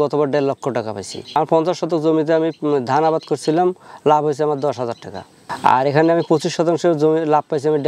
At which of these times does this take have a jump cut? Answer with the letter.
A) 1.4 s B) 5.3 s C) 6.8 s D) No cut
A